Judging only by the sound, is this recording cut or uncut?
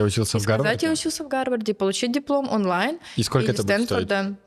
uncut